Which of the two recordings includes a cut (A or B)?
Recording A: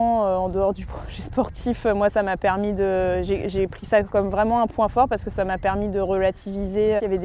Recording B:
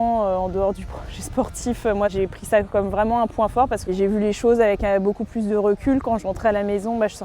B